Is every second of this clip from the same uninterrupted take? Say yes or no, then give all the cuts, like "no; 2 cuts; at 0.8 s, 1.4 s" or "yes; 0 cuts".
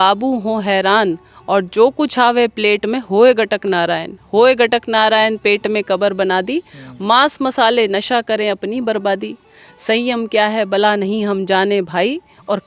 yes; 0 cuts